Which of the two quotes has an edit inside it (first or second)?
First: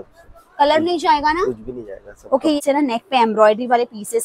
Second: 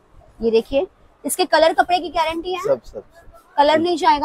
first